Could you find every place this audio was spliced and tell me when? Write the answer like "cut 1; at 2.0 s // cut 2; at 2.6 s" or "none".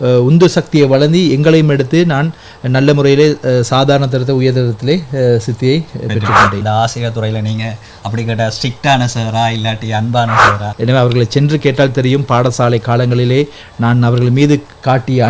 cut 1; at 6.6 s // cut 2; at 10.6 s